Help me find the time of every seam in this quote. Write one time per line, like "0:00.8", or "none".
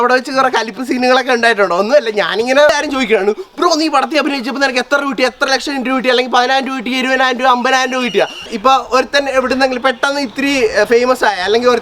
0:02.7
0:08.5